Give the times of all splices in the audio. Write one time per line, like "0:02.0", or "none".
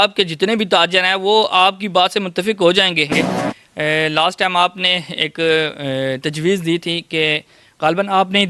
0:03.3